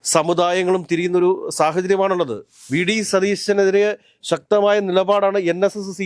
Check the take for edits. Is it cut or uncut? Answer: cut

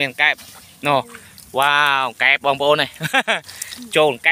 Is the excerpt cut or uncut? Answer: uncut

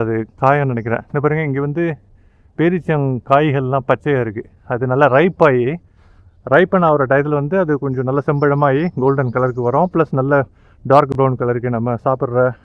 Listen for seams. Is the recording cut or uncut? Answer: uncut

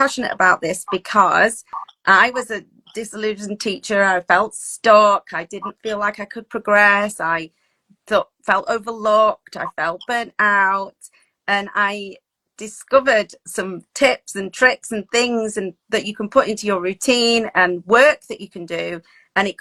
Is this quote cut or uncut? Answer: uncut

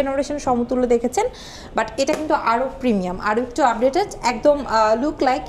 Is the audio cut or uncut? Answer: uncut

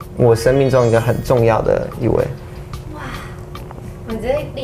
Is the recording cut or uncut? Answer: uncut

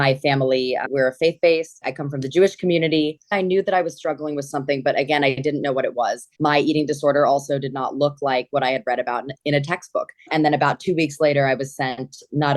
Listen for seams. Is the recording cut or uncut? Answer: cut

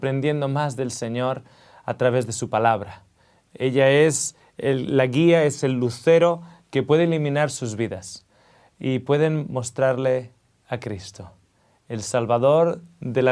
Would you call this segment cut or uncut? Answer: uncut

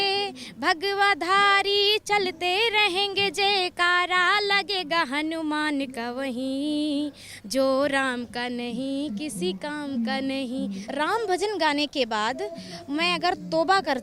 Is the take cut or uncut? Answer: cut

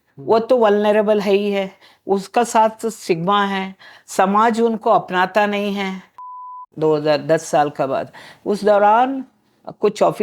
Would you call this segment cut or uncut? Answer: cut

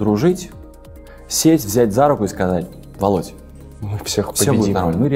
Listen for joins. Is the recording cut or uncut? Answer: uncut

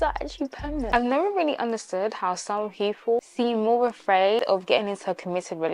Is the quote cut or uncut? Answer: cut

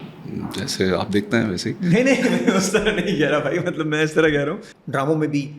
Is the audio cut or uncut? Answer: cut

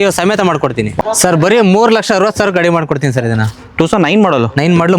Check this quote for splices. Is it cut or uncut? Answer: cut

